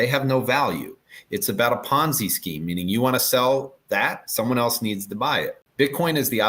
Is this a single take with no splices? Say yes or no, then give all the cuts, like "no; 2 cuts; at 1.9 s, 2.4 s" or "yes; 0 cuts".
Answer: no; 1 cut; at 5.6 s